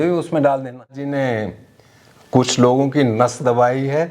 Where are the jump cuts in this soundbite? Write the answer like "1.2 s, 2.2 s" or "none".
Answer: 1.0 s